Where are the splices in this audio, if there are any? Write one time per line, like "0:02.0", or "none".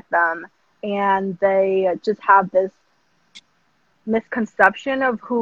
none